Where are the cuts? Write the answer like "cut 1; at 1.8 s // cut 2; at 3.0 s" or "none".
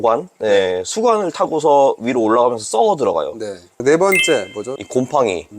cut 1; at 3.8 s